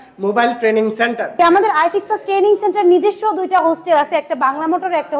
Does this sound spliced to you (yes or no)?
yes